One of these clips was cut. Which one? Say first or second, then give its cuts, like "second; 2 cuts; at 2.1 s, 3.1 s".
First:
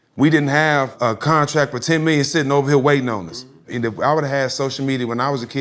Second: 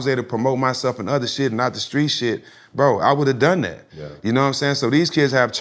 first; 2 cuts; at 0.9 s, 3.6 s